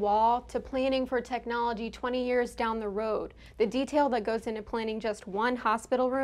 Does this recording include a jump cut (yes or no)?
no